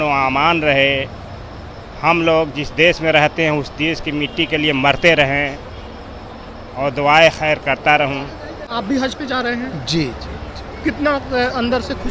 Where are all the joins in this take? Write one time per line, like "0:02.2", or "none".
0:08.7